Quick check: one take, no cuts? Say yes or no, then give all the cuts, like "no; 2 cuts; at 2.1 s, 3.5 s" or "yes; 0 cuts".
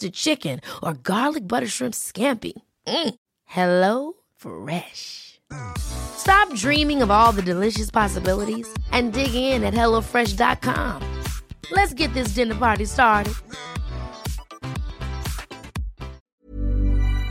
no; 1 cut; at 16.3 s